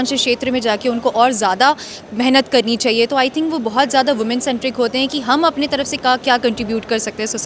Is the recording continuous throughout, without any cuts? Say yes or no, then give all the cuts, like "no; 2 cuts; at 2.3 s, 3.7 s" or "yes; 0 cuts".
yes; 0 cuts